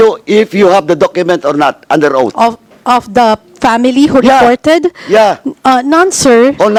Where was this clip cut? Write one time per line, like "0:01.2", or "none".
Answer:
none